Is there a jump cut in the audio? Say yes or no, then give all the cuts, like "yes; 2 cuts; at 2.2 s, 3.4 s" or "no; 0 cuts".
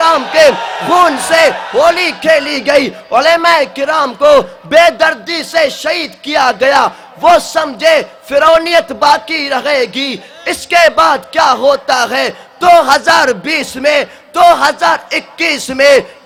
no; 0 cuts